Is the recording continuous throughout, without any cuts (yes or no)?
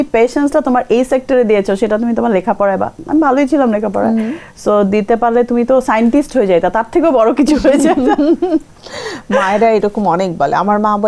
yes